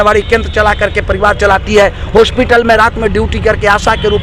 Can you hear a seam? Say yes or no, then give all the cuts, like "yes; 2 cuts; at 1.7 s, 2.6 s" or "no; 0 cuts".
no; 0 cuts